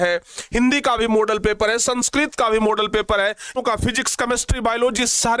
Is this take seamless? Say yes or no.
no